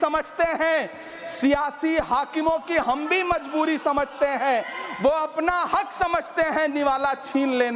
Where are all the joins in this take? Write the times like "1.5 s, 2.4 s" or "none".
none